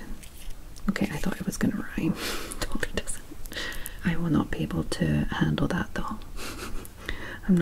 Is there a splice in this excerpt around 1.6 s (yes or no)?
no